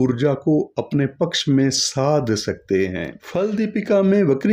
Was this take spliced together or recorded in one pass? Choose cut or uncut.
cut